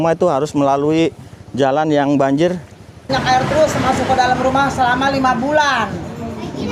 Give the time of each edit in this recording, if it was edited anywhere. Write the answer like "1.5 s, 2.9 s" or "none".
3.1 s